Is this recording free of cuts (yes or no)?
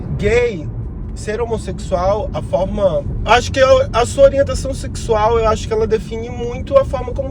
no